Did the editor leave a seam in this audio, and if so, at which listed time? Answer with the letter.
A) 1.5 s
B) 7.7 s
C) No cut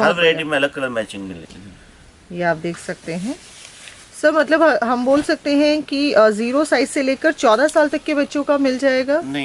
A